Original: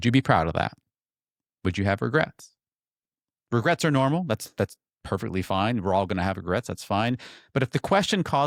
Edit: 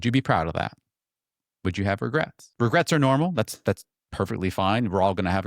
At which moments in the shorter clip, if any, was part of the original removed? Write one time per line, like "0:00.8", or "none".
0:02.4